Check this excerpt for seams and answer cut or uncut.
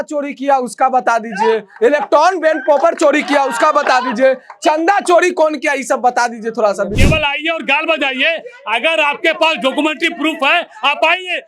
cut